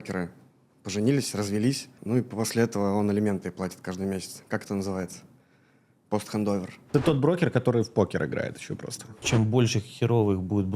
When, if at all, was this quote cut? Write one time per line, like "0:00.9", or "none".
0:01.9
0:06.8
0:09.2